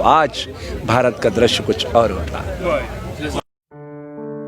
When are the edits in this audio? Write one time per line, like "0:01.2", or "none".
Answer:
0:03.4